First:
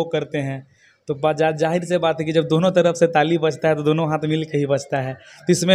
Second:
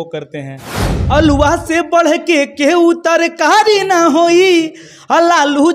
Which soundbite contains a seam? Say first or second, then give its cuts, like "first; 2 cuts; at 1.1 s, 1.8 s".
second; 1 cut; at 1.0 s